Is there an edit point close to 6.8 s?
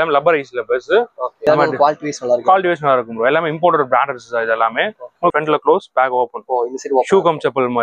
no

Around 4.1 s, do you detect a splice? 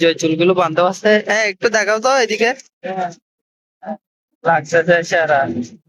no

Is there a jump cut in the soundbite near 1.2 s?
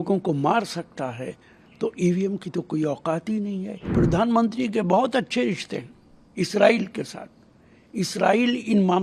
no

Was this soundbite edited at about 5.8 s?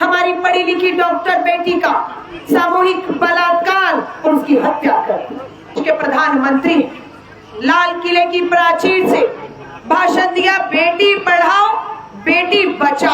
yes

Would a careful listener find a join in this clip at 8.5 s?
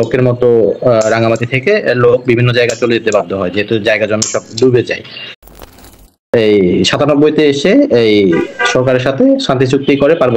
no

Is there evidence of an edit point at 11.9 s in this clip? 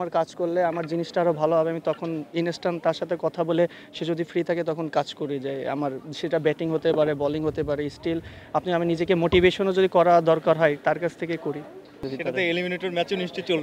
yes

